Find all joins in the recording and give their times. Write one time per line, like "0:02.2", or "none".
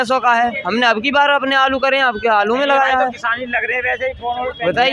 none